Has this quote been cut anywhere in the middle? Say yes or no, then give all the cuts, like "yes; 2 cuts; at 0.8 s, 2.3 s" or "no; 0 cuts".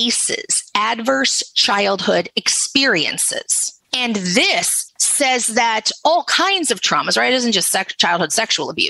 no; 0 cuts